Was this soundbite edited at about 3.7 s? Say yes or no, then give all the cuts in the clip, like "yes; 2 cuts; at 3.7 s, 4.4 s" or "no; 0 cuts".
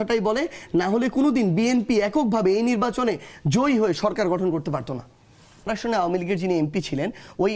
no; 1 cut; at 5.7 s